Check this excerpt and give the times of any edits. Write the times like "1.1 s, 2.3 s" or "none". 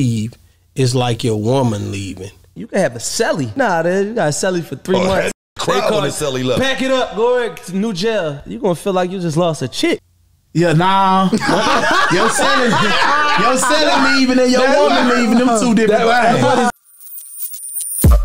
16.7 s